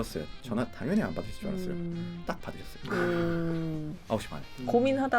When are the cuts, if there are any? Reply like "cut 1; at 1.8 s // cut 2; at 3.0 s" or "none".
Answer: cut 1; at 2.2 s